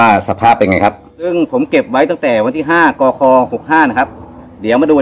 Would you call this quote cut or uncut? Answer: cut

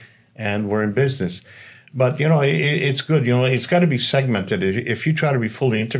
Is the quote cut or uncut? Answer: uncut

